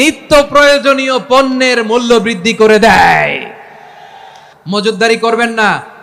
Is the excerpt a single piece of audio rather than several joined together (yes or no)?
no